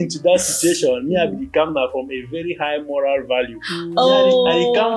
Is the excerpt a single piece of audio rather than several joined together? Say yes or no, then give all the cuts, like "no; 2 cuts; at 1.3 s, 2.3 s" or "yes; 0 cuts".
yes; 0 cuts